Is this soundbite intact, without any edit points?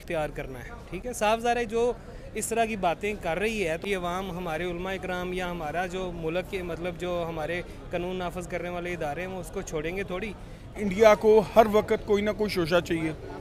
no; 2 cuts; at 3.8 s, 10.7 s

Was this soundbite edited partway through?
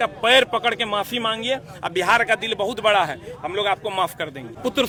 no; 0 cuts

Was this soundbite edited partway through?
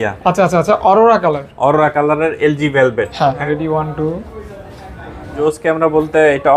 yes; 2 cuts; at 3.4 s, 5.3 s

